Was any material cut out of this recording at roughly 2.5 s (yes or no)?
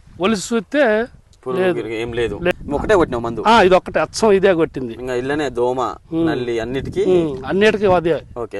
yes